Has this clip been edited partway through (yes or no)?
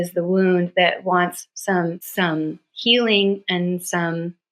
yes